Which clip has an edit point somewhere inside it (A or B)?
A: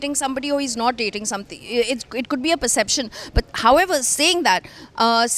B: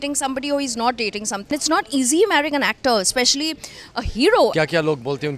B